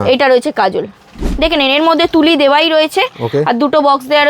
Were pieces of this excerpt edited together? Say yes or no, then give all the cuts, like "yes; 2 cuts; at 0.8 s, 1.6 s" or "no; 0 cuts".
yes; 1 cut; at 1.2 s